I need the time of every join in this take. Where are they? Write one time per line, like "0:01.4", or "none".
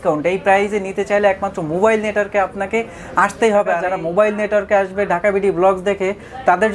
0:03.9